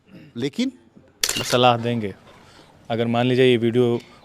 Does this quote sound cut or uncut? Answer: cut